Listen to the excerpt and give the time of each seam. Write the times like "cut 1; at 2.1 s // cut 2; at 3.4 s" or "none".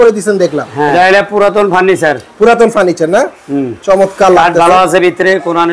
cut 1; at 0.9 s